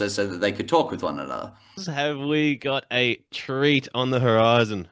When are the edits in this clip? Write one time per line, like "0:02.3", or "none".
0:01.9